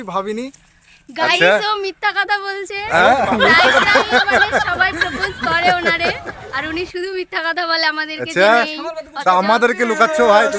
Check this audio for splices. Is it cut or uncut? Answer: uncut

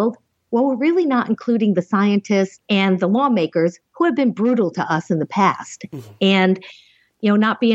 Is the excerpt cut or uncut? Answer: cut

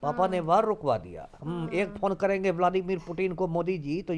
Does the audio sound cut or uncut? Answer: uncut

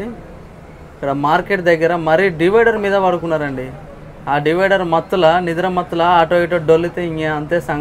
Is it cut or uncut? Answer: uncut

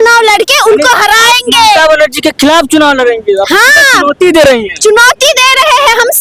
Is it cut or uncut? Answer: uncut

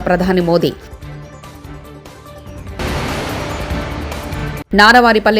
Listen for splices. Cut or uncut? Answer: cut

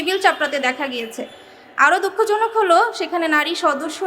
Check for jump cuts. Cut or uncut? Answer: uncut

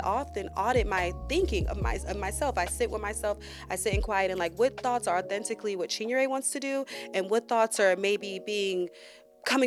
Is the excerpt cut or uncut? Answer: uncut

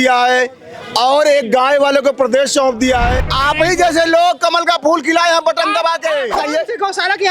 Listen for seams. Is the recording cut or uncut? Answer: cut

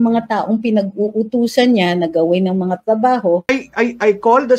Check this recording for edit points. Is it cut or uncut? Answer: cut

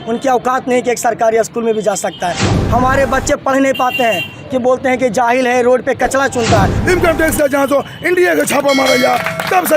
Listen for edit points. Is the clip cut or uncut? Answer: cut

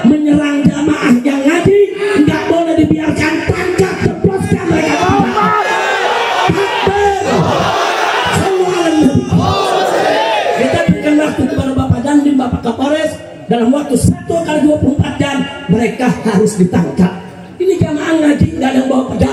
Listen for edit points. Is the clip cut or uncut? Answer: uncut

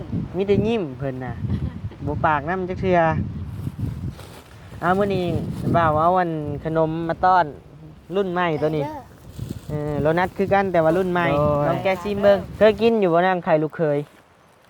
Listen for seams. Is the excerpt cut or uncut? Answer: cut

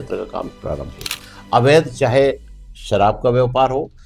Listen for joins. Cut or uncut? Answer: cut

